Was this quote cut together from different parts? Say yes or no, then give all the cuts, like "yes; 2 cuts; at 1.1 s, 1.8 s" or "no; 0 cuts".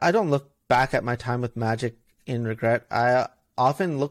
no; 0 cuts